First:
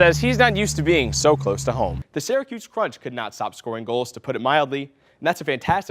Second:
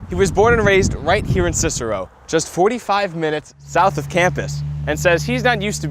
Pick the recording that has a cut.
first; 1 cut; at 1.9 s

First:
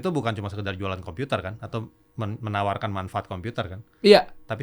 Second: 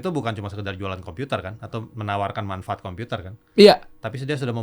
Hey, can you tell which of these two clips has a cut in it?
second; 1 cut; at 1.9 s

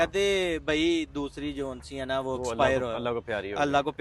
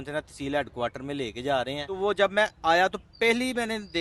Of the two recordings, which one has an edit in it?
second; 1 cut; at 1.9 s

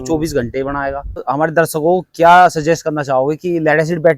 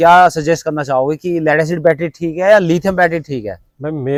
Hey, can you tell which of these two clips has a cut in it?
first; 1 cut; at 1.2 s

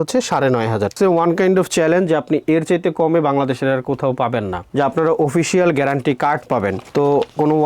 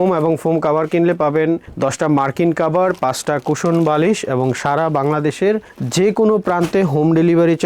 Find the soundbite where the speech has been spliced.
first; 2 cuts; at 0.9 s, 4.7 s

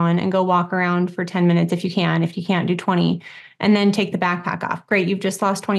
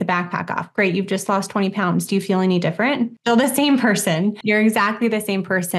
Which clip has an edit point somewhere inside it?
second; 2 cuts; at 3.2 s, 4.4 s

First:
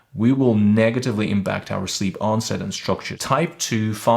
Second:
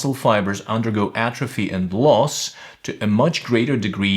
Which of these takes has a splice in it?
first; 1 cut; at 3.1 s

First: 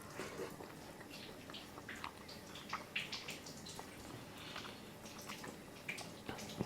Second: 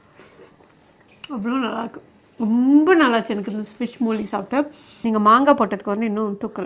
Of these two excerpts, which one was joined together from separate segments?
second; 2 cuts; at 1.1 s, 4.9 s

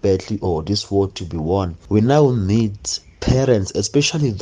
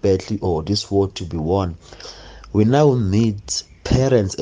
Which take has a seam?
first; 1 cut; at 1.8 s

